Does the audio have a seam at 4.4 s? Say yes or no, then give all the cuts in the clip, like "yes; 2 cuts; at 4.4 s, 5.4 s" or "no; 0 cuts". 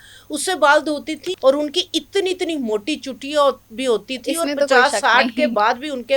no; 1 cut; at 1.3 s